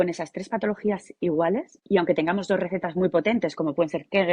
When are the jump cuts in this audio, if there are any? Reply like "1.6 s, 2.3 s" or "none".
1.7 s

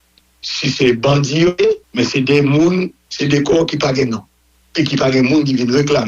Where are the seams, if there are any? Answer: 1.5 s

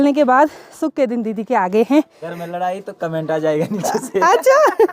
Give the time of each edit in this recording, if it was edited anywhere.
2.2 s

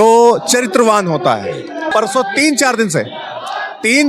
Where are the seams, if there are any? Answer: 1.9 s

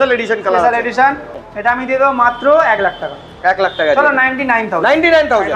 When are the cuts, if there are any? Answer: 1.8 s

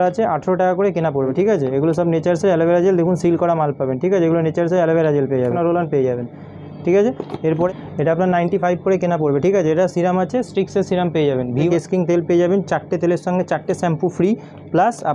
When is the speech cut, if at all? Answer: 1.3 s, 5.5 s, 7.7 s, 11.7 s

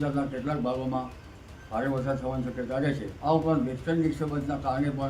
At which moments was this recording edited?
3.1 s

